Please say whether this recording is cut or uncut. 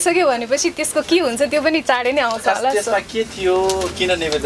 uncut